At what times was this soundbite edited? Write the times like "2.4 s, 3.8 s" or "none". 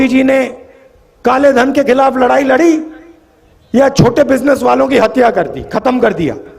none